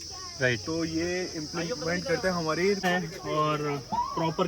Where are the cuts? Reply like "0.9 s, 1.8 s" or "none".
2.8 s